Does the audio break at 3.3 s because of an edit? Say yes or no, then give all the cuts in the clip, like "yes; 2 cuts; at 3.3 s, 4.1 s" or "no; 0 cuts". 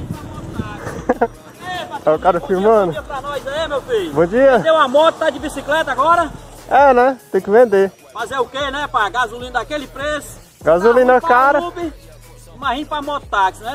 no; 0 cuts